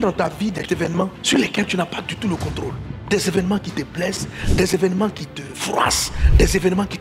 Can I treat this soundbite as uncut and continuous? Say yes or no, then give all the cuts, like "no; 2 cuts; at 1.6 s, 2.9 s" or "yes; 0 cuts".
yes; 0 cuts